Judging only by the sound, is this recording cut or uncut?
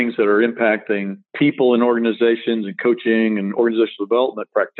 cut